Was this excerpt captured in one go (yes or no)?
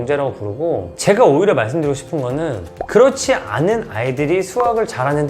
no